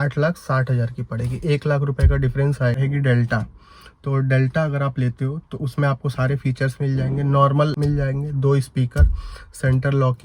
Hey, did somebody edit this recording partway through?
yes; 2 cuts; at 2.8 s, 7.8 s

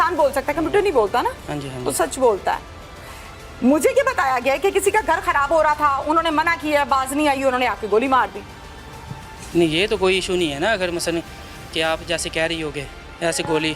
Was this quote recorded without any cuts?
yes; 0 cuts

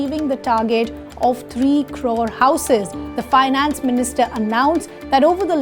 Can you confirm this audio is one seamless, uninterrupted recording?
no; 1 cut; at 3.0 s

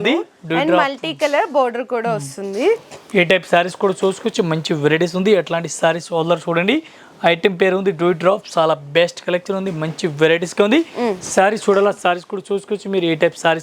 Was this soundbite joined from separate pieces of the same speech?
no; 0 cuts

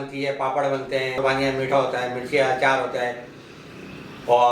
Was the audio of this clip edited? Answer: yes; 1 cut; at 1.2 s

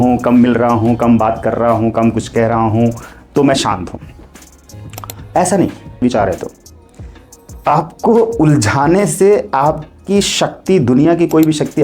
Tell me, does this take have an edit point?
yes; 1 cut; at 6.0 s

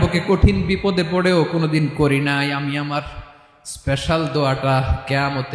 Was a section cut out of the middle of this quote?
no; 0 cuts

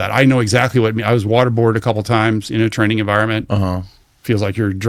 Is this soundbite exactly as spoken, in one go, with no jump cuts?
yes; 0 cuts

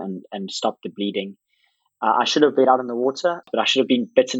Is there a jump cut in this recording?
yes; 1 cut; at 3.5 s

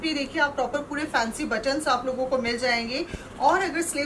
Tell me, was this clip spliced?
no; 0 cuts

